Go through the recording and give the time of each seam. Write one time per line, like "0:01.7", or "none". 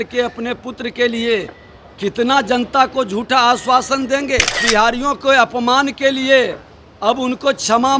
0:04.6